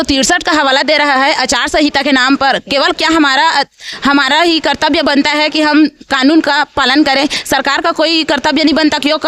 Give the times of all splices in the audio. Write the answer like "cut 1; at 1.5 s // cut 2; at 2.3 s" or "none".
none